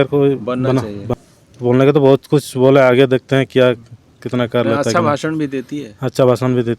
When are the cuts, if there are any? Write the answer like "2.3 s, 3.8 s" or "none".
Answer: 1.1 s